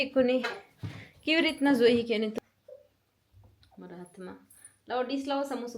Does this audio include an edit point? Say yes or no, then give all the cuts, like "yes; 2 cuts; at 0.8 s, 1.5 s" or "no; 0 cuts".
yes; 1 cut; at 2.3 s